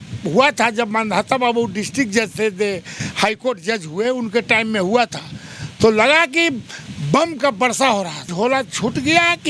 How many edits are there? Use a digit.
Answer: 1